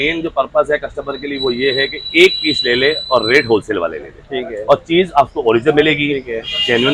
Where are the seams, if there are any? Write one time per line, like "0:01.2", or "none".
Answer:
none

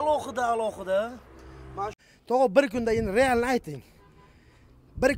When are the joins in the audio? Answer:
0:02.0

